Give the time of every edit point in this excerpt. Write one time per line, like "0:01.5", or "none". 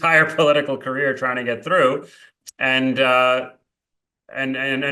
0:02.4